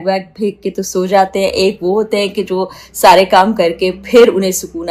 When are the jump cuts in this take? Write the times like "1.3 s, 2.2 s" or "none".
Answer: none